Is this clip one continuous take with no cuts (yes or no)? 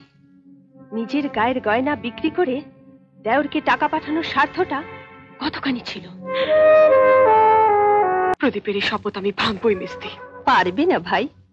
no